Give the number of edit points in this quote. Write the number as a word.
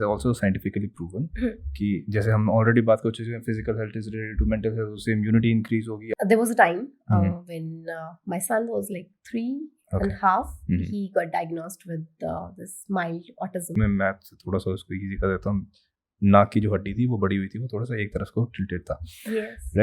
two